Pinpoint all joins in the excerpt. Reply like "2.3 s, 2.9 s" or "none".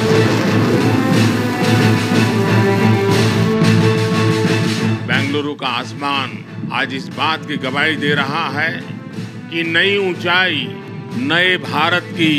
none